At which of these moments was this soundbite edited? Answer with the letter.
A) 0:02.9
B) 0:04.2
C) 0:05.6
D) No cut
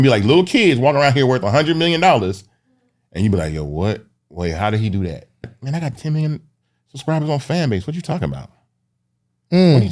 C